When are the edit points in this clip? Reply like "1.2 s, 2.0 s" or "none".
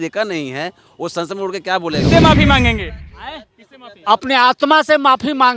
2.1 s